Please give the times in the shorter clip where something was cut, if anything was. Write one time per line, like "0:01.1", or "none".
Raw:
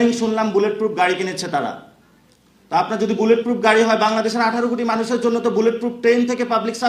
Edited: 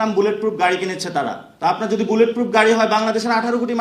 0:01.4